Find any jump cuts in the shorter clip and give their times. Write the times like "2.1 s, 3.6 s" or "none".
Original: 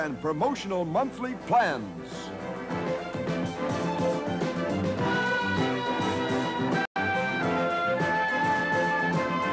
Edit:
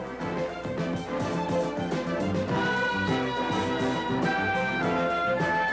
4.4 s